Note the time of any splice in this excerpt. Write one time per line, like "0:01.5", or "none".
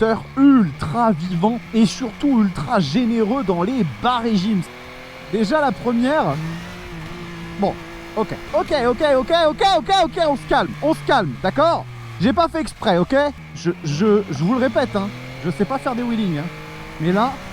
0:01.6
0:04.7
0:08.4
0:13.5